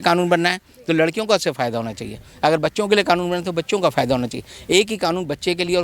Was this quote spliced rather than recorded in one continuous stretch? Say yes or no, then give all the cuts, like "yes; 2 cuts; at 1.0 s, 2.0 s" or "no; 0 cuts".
no; 0 cuts